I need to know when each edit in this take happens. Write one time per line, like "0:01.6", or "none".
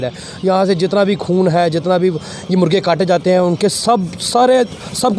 none